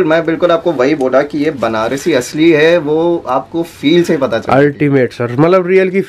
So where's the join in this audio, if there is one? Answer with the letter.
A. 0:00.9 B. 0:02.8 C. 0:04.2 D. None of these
D